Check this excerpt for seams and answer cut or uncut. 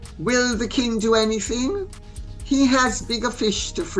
uncut